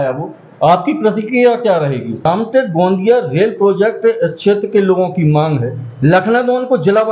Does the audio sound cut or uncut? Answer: cut